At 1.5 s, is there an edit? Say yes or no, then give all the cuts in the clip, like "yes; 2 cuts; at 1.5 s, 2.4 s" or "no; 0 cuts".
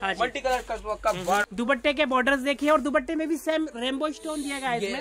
yes; 1 cut; at 1.5 s